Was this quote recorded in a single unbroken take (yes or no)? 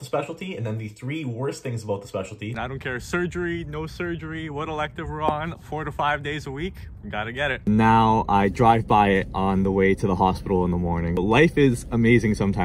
no